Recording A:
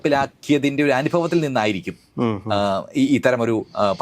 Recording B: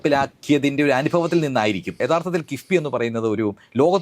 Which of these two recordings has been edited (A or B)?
B